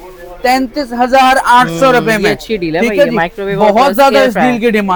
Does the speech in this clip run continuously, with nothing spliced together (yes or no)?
yes